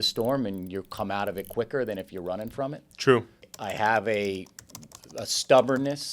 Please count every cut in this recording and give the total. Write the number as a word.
one